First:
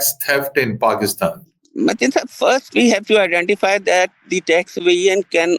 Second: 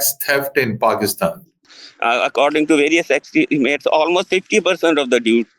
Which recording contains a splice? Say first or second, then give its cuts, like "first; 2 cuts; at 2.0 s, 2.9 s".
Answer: second; 1 cut; at 1.6 s